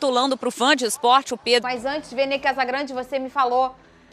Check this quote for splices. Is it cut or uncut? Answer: cut